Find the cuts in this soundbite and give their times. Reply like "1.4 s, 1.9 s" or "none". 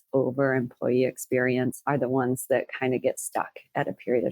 1.8 s